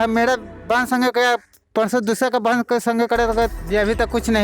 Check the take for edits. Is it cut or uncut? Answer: cut